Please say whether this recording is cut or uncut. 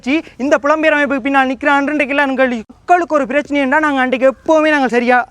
cut